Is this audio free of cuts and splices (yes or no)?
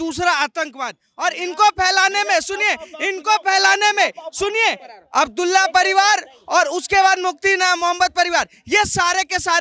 yes